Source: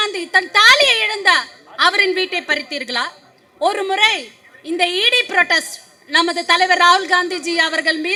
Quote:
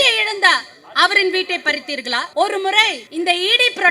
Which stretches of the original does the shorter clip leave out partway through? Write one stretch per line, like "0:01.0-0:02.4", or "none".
0:03.1-0:03.5
0:04.3-0:04.5

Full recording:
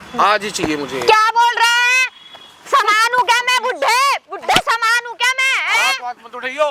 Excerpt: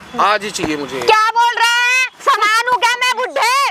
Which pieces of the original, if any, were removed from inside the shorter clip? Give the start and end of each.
0:02.0-0:02.5

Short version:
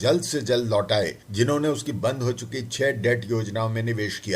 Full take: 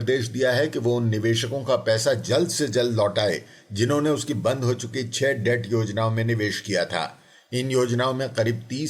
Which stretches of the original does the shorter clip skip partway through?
0:03.5-0:03.6

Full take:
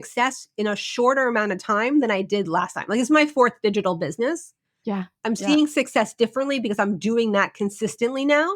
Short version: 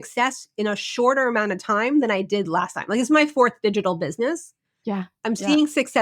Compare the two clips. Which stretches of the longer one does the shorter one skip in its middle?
none

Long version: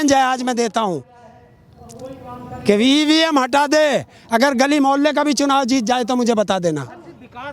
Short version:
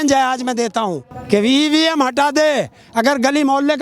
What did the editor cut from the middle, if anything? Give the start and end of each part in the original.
0:01.1-0:02.5

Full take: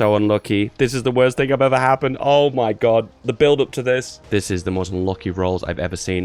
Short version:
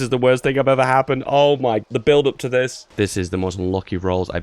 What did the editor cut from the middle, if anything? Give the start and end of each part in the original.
0:02.7-0:03.1

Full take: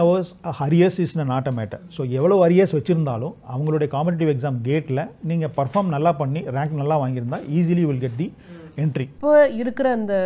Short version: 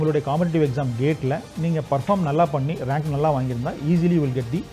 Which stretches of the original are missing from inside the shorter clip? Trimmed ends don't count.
none

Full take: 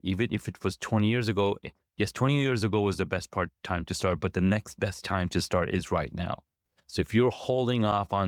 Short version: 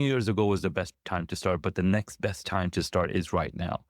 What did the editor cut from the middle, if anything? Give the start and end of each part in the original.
0:03.3-0:03.5

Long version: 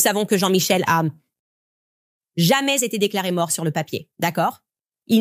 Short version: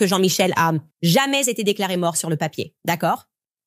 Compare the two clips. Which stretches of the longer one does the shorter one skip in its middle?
0:01.2-0:02.2

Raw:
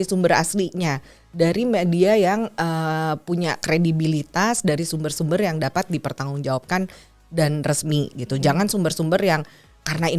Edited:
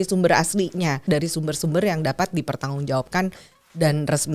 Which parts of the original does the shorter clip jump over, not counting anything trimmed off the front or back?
0:01.0-0:04.6

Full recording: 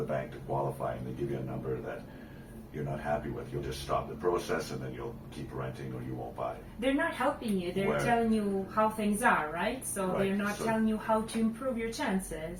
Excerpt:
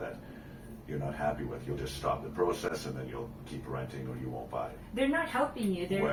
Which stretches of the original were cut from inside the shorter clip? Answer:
none

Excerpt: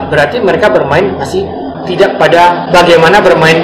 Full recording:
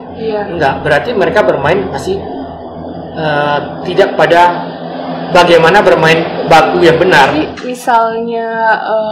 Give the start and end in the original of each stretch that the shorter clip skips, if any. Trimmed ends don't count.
0:02.5-0:03.7
0:04.6-0:05.2

